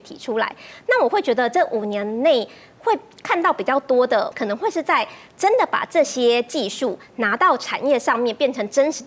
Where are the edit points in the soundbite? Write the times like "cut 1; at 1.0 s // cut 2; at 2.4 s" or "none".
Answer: cut 1; at 4.3 s